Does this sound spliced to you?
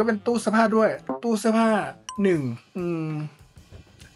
no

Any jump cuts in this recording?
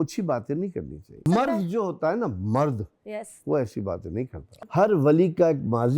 yes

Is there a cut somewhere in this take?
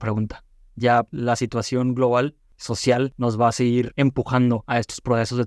yes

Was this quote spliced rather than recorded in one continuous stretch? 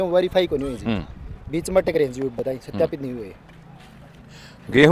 no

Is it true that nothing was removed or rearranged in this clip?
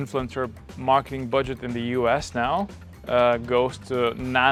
yes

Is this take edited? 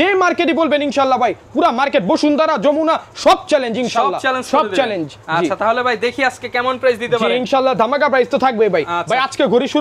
no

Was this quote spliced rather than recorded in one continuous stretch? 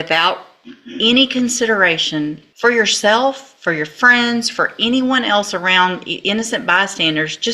yes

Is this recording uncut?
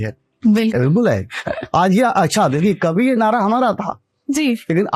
yes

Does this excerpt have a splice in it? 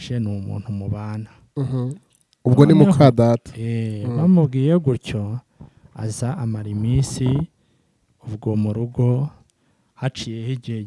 no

